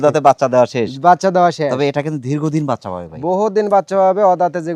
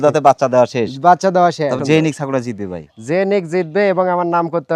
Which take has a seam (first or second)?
second